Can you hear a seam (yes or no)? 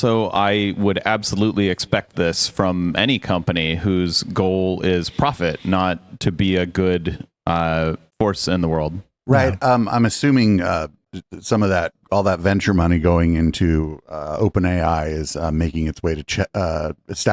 no